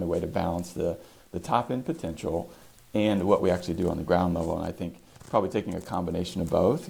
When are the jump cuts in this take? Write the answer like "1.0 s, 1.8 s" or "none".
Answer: none